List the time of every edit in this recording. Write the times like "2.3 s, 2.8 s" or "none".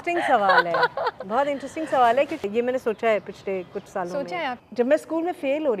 2.4 s, 4.6 s